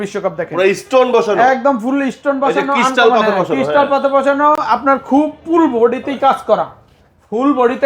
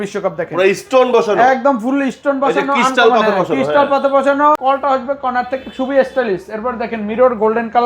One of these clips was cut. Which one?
second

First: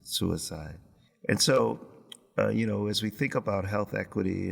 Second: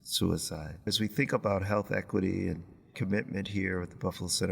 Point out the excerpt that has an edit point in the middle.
second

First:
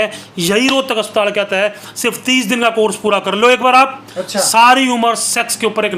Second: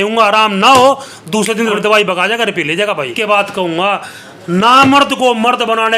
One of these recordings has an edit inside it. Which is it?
second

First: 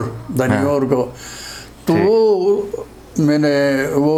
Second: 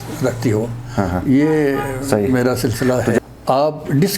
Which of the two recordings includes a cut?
second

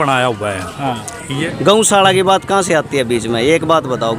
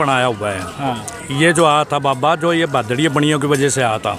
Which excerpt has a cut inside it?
first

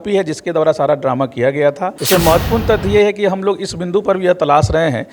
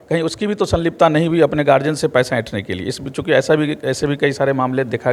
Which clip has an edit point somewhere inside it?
first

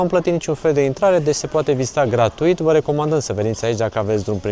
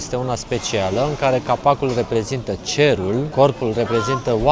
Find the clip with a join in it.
second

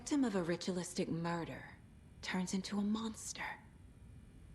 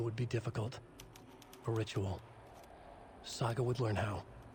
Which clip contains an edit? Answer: first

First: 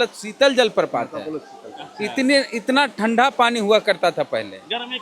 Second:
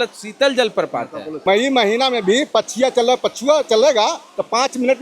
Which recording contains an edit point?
second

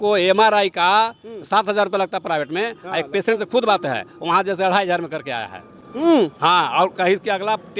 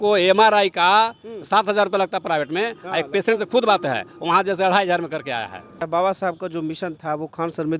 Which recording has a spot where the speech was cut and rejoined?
second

